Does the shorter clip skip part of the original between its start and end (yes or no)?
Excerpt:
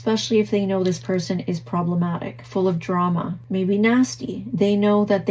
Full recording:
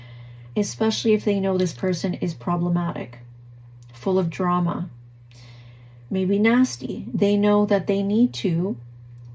yes